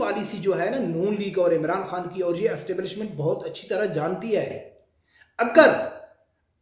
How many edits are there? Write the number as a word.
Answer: zero